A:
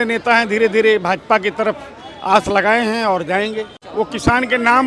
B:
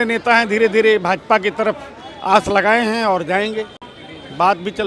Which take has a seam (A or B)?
A